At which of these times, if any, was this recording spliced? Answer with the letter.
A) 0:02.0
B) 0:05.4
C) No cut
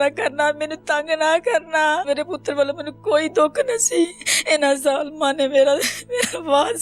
A